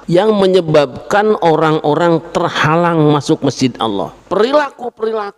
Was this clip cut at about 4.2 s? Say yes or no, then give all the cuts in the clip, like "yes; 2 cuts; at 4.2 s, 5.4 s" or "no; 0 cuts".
yes; 1 cut; at 4.2 s